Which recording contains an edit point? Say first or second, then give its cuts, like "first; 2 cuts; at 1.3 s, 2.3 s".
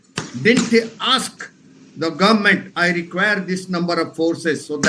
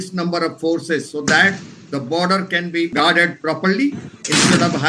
second; 1 cut; at 2.9 s